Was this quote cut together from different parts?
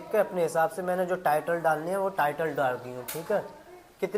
no; 0 cuts

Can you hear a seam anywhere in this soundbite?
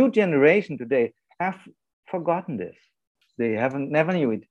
yes; 1 cut; at 3.2 s

